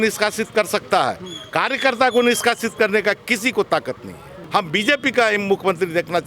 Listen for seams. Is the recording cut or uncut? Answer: cut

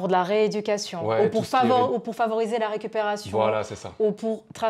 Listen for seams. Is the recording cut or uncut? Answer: uncut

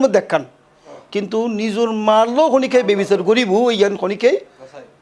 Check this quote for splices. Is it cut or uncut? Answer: uncut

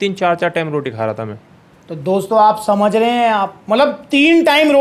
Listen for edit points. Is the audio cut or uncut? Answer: uncut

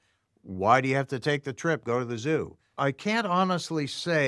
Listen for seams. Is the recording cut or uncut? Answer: cut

